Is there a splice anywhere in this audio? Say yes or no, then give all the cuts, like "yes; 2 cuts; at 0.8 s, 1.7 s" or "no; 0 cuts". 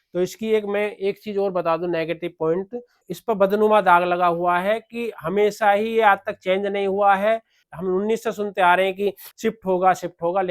yes; 3 cuts; at 3.1 s, 7.6 s, 9.3 s